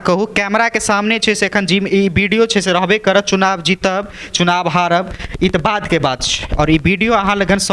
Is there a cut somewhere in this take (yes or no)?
no